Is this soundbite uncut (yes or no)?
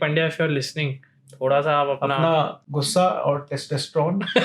yes